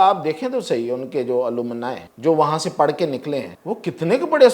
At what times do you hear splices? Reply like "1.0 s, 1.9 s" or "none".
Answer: 2.0 s, 3.5 s